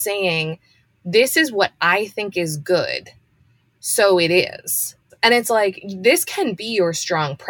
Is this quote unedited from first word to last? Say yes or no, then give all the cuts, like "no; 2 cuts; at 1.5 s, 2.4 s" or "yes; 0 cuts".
no; 1 cut; at 4.9 s